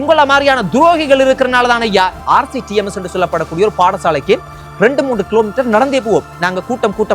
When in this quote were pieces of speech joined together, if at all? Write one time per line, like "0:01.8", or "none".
0:02.2